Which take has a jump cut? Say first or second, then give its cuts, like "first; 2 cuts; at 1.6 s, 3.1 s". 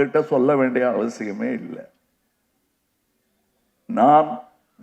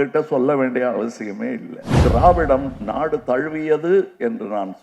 second; 1 cut; at 1.9 s